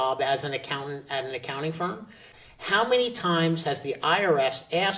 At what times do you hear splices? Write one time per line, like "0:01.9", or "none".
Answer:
0:02.2